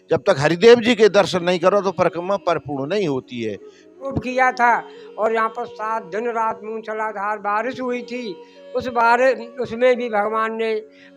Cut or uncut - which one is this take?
cut